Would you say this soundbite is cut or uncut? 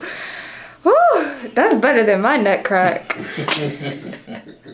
uncut